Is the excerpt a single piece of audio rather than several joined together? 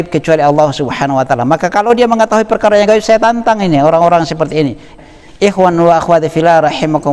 no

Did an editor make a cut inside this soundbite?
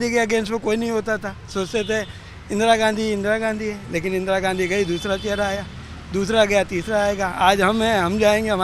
no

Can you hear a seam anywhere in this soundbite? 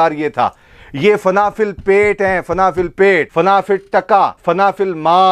yes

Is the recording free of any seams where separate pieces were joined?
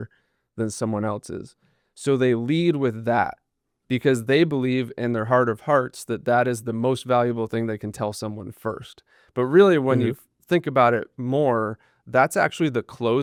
yes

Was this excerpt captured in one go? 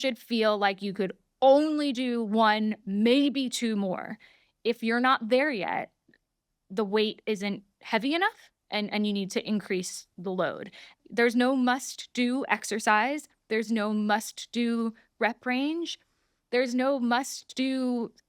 no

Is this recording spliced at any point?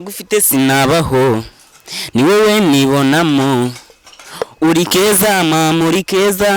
no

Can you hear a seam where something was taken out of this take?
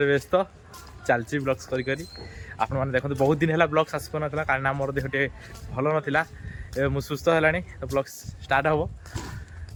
no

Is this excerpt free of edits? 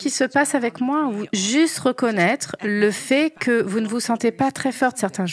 yes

